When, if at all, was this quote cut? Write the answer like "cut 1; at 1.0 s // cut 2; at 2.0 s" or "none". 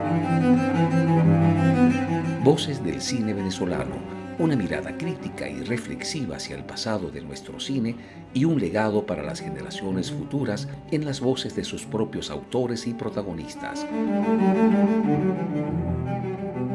none